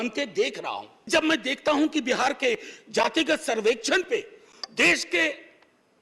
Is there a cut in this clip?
yes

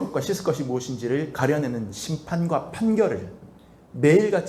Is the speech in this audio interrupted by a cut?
no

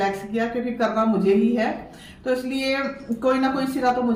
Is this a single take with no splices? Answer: yes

